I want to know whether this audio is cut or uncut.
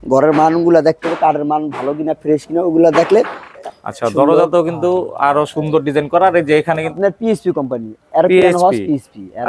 cut